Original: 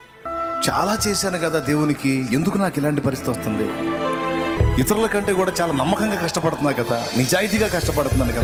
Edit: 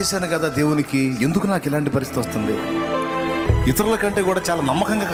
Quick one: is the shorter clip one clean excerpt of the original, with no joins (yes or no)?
yes